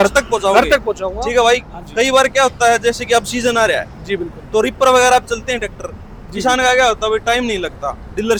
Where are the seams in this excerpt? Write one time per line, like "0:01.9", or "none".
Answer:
none